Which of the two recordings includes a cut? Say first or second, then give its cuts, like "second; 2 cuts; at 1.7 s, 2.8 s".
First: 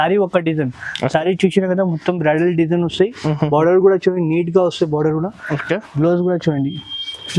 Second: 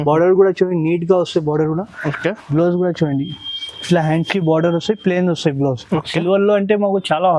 second; 1 cut; at 6.0 s